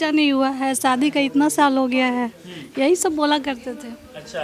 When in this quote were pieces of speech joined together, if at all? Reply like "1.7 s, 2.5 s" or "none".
none